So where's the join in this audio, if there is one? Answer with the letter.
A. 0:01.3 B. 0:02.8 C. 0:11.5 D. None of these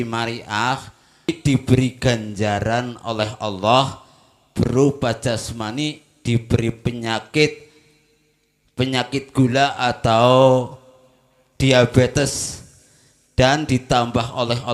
A